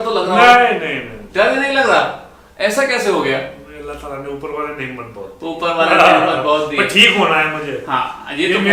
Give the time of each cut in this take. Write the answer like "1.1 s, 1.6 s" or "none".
none

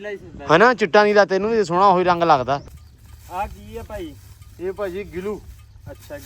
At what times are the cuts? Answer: 2.7 s

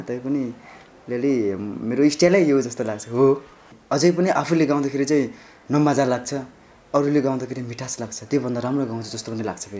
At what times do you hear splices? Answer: 3.7 s

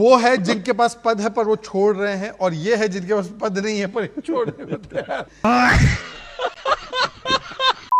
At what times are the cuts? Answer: 5.3 s

